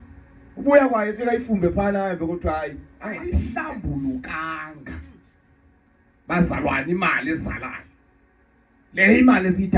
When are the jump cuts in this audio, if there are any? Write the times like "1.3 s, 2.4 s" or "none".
3.6 s